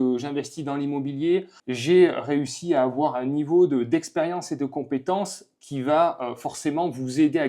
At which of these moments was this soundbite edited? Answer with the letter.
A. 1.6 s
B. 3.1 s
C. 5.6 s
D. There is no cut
A